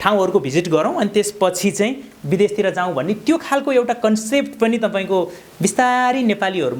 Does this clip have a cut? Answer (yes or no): no